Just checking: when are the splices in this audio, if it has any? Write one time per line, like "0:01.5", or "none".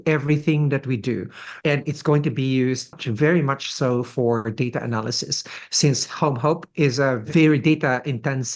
0:01.5
0:03.0
0:07.3